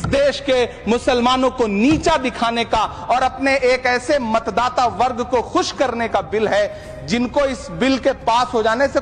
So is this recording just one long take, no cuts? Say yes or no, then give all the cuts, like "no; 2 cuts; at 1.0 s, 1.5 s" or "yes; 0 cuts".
yes; 0 cuts